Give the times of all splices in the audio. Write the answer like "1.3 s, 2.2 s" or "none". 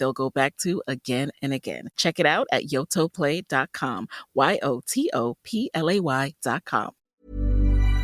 7.0 s